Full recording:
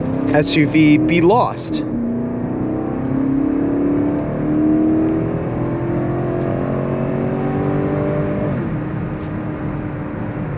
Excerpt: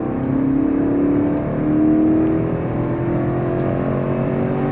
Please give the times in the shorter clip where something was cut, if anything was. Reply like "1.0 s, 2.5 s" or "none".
none

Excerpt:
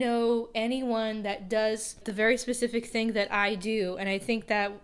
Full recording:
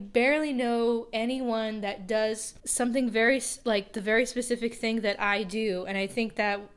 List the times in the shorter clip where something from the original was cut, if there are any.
2.0 s

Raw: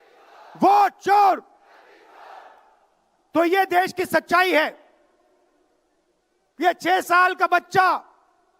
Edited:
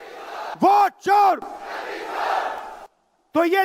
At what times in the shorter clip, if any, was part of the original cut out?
none

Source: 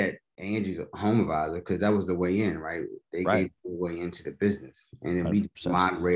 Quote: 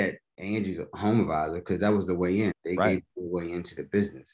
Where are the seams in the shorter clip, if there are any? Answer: 2.6 s

